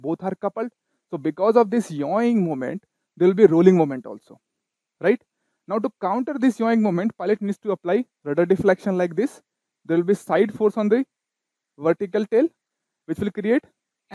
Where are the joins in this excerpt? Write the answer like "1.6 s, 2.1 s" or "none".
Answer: none